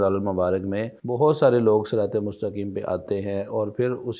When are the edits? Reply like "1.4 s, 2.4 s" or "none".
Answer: 0.9 s